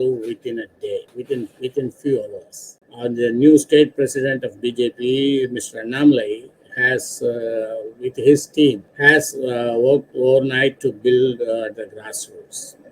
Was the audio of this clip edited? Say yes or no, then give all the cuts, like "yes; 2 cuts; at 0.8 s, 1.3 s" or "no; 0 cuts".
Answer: yes; 3 cuts; at 1.1 s, 2.8 s, 8.9 s